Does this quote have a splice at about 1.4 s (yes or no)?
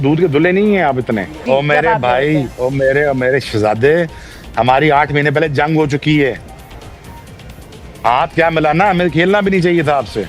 yes